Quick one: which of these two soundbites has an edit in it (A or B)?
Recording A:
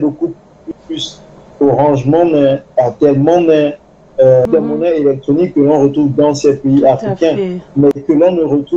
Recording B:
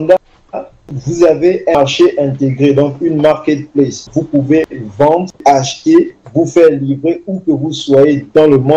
B